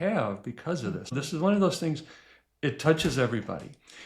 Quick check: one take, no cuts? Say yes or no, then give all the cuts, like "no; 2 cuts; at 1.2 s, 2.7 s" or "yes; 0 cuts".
no; 1 cut; at 1.1 s